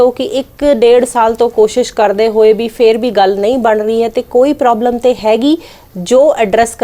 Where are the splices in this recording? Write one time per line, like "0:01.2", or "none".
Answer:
none